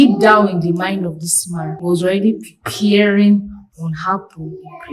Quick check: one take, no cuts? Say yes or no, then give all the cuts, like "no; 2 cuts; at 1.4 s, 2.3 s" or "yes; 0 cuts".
no; 1 cut; at 1.8 s